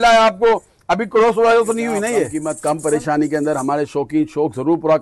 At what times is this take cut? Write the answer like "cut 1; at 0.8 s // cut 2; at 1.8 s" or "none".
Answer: cut 1; at 2.4 s